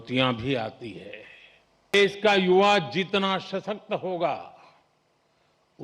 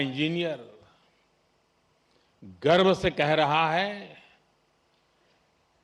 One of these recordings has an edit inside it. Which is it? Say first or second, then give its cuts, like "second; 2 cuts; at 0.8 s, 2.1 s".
first; 1 cut; at 1.9 s